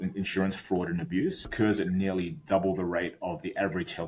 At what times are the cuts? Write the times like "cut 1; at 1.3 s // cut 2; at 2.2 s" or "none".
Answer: cut 1; at 1.4 s